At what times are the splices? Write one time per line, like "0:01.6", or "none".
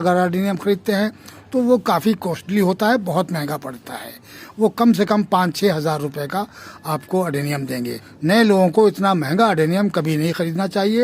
0:08.1